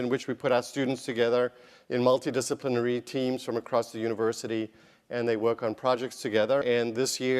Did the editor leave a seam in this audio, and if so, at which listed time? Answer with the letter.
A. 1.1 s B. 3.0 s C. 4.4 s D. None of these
C